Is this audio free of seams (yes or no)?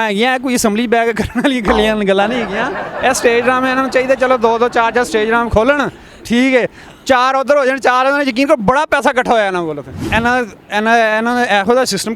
yes